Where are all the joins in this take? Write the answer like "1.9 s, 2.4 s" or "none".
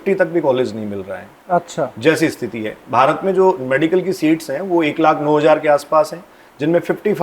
none